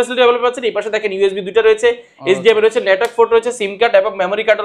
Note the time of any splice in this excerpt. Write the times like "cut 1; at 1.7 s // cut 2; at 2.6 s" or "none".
none